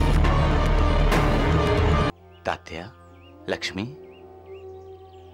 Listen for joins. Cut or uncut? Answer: cut